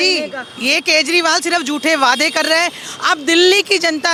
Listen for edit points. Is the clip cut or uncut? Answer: uncut